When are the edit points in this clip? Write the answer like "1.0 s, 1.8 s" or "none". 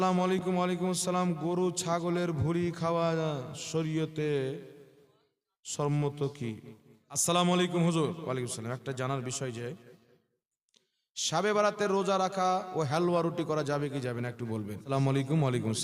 7.2 s, 14.9 s